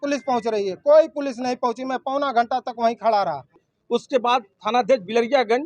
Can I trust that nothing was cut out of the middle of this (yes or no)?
no